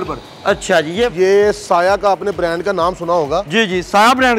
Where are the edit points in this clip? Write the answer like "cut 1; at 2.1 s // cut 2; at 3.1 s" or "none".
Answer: cut 1; at 1.1 s